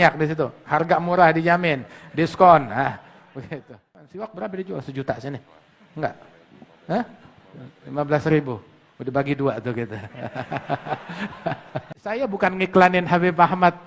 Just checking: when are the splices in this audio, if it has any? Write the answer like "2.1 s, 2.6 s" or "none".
4.1 s, 12.2 s